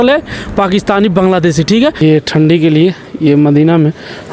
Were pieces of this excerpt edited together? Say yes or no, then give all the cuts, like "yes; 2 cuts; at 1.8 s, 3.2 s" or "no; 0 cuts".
yes; 1 cut; at 2.0 s